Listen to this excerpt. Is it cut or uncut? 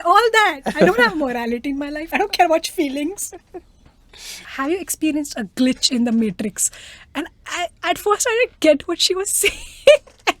cut